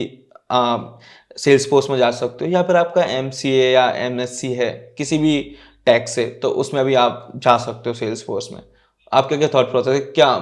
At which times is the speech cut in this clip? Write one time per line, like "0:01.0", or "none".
none